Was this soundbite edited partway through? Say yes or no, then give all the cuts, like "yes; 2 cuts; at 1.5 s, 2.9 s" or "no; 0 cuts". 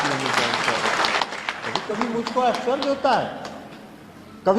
yes; 1 cut; at 1.2 s